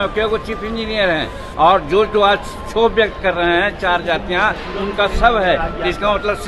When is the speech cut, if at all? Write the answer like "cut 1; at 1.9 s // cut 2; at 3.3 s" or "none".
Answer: none